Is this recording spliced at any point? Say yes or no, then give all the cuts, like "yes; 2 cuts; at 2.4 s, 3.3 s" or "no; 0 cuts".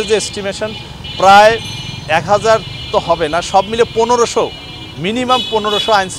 no; 0 cuts